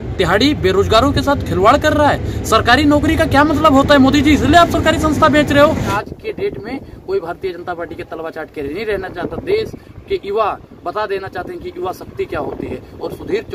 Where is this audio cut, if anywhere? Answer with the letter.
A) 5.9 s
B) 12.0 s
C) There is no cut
A